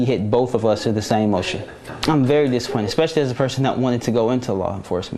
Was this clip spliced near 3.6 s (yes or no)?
no